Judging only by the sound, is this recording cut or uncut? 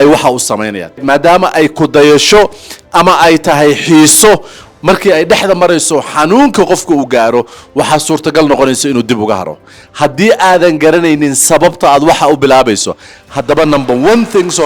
cut